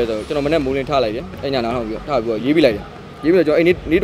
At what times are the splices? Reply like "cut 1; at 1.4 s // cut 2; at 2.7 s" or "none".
none